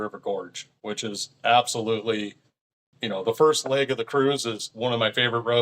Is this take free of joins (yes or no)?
no